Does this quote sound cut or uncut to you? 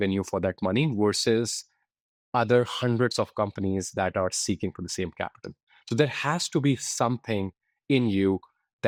uncut